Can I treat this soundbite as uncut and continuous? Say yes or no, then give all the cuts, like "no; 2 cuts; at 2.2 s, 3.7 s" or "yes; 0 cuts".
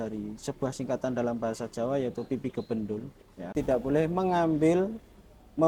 no; 1 cut; at 3.5 s